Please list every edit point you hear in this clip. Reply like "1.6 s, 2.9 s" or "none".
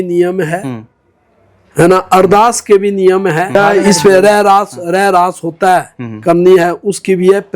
3.6 s

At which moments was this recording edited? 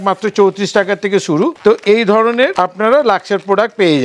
1.6 s, 2.5 s

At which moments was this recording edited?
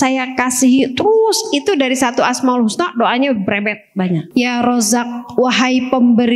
4.3 s

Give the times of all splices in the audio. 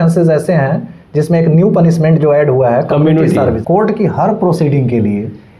3.6 s

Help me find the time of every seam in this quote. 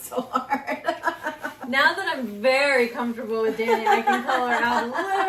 1.5 s

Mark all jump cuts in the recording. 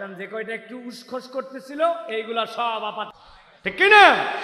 3.2 s

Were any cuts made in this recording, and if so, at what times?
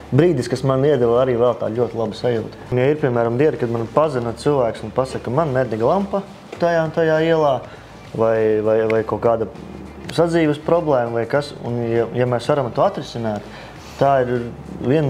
2.7 s

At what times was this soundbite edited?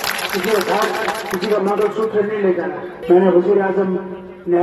2.9 s

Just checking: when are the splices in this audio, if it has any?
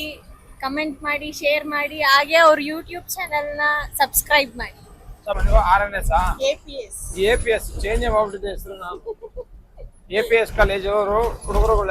5.4 s

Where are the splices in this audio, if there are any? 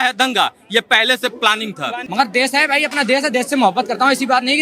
2.0 s

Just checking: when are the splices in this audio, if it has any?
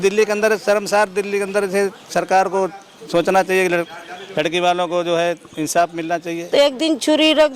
6.5 s

